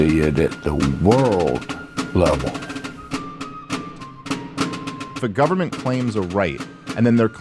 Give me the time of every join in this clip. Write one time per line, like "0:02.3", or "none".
0:03.1